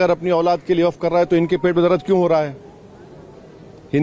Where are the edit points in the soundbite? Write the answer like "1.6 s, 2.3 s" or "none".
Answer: none